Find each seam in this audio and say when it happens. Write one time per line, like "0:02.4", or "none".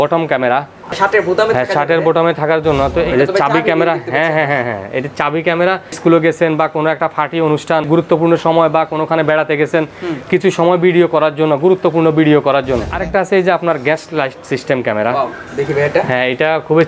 0:01.0
0:03.1
0:06.0
0:07.9
0:12.9